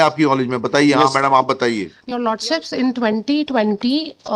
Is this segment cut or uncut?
cut